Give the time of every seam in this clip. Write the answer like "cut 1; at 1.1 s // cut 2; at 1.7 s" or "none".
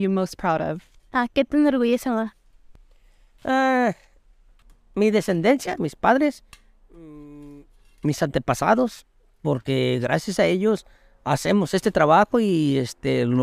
cut 1; at 0.9 s